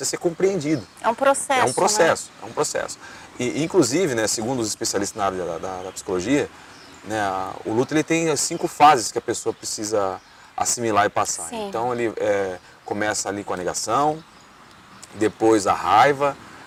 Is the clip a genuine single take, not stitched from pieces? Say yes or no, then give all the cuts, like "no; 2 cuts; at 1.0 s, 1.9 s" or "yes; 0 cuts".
yes; 0 cuts